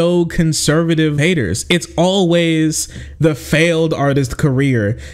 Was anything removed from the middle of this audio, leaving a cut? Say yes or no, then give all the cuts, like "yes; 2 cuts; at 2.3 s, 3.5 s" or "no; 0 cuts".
yes; 1 cut; at 1.2 s